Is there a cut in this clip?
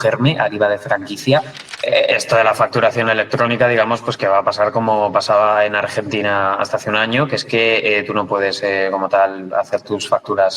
yes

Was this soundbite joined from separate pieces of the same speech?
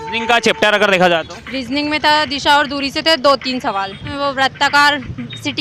yes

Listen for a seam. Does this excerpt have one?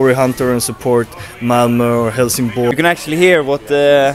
yes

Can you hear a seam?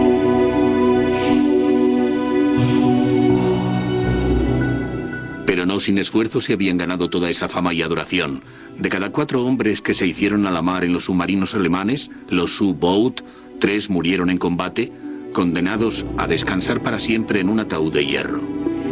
no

